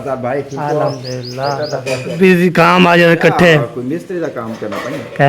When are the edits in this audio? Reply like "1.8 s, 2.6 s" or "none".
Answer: 2.1 s